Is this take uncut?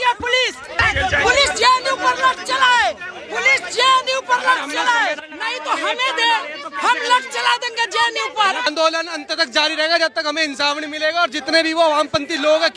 no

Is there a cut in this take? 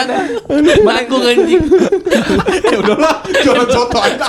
no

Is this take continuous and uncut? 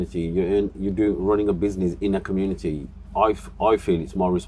yes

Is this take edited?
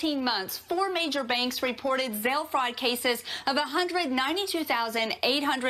no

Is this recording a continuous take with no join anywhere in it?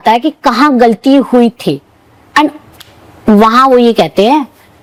yes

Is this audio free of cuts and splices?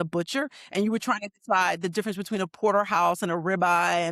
yes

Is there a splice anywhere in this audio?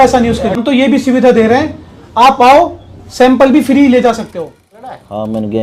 yes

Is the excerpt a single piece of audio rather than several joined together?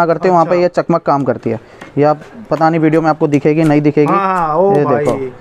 yes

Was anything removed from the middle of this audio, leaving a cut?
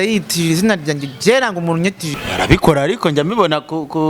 yes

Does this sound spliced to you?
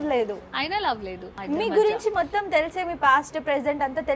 yes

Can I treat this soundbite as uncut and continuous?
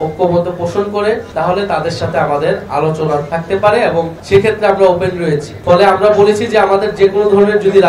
yes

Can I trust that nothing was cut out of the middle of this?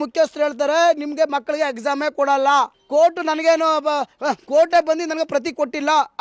no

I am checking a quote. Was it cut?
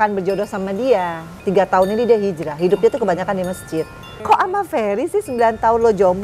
yes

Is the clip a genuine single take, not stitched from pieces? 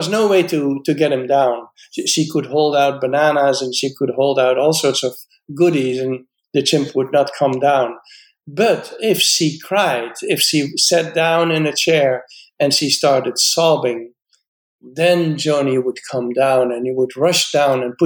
yes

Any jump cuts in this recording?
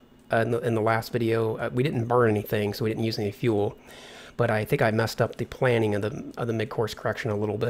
no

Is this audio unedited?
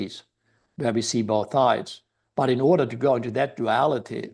yes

